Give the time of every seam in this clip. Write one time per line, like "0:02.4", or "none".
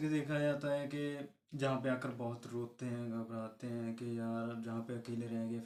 none